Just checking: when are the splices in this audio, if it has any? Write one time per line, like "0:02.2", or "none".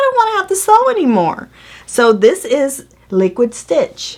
none